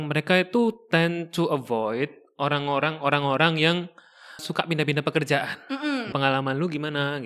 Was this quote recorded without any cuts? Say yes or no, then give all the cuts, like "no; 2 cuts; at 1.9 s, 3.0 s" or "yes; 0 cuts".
no; 2 cuts; at 4.4 s, 6.1 s